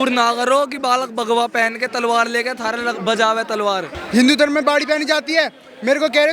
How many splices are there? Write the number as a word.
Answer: one